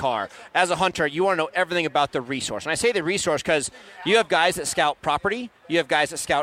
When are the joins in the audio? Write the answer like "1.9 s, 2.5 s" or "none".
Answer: none